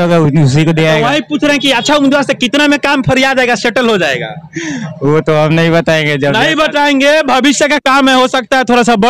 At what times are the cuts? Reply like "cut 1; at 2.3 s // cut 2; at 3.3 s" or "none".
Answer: none